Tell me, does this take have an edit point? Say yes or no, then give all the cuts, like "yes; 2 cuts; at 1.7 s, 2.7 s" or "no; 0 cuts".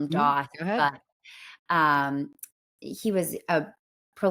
no; 0 cuts